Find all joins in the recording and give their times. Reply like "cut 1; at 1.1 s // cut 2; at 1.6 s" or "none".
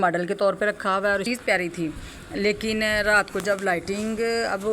cut 1; at 1.2 s